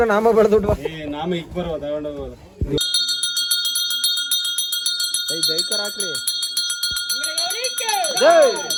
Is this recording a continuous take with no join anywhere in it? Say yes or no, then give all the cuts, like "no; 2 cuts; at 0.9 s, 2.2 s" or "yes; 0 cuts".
yes; 0 cuts